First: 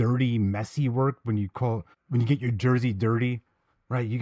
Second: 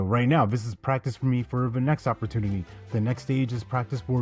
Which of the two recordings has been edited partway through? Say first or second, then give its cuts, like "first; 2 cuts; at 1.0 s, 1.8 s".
first; 1 cut; at 1.9 s